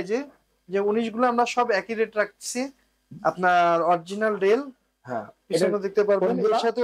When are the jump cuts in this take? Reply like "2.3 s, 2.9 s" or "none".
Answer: none